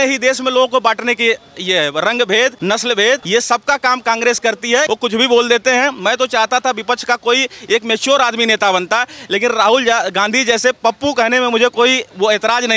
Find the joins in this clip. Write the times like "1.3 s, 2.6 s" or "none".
3.0 s, 4.9 s